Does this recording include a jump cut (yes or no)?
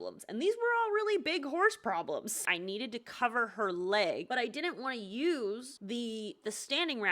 yes